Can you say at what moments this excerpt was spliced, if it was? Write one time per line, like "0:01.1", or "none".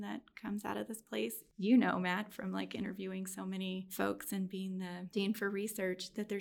0:01.4
0:03.9
0:05.1